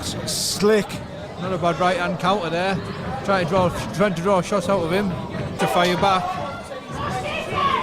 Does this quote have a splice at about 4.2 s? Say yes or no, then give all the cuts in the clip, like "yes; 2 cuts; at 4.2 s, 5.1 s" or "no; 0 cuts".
no; 1 cut; at 5.6 s